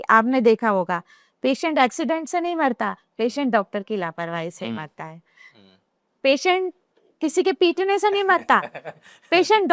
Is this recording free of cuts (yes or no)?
yes